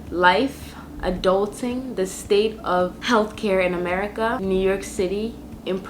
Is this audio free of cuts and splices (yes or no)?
no